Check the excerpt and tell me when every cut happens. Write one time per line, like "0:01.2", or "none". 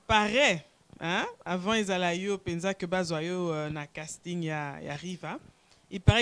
none